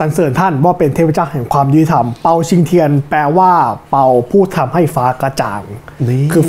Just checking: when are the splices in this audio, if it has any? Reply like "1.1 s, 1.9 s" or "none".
none